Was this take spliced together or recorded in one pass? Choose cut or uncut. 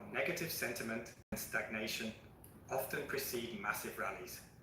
cut